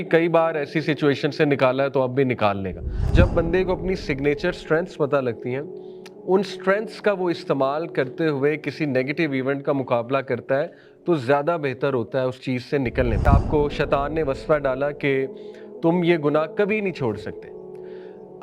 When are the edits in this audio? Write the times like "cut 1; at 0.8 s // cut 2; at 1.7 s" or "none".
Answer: cut 1; at 3.1 s // cut 2; at 13.3 s